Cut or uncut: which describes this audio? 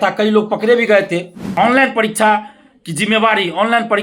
cut